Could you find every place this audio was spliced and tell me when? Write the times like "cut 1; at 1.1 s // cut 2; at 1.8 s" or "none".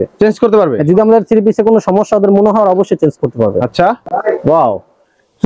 cut 1; at 4.2 s